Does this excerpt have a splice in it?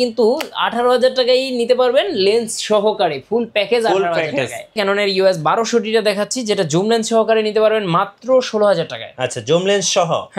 yes; 1 cut; at 4.8 s

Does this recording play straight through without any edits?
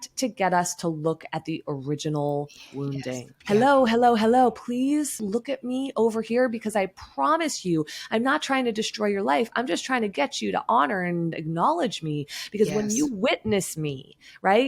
no; 2 cuts; at 3.3 s, 5.2 s

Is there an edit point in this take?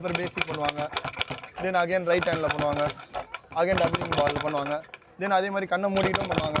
no; 0 cuts

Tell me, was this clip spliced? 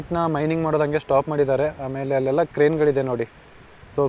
no; 0 cuts

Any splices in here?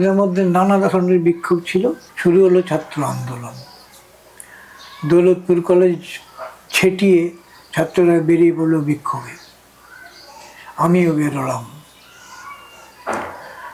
yes; 1 cut; at 2.1 s

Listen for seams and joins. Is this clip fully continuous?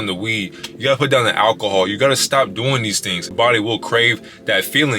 no; 1 cut; at 3.3 s

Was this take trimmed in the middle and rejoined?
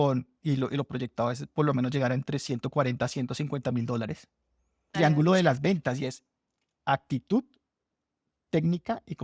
yes; 1 cut; at 4.9 s

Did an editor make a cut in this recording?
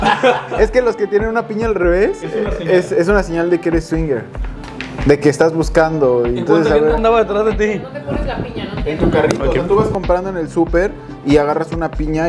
no; 0 cuts

